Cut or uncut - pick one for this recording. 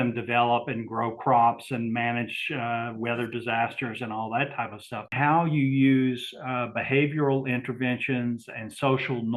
cut